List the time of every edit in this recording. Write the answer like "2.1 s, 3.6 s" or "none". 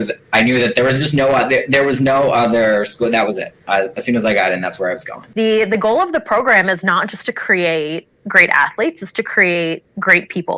5.2 s